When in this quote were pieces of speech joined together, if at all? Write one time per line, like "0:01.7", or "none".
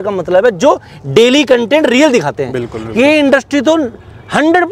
none